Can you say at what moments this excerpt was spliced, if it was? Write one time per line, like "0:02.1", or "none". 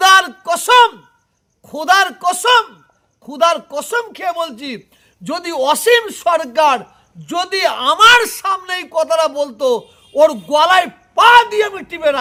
none